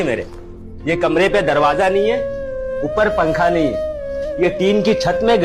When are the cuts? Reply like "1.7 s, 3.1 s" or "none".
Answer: none